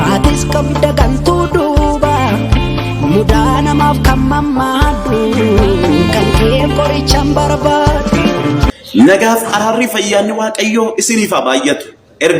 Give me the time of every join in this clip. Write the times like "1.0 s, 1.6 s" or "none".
8.7 s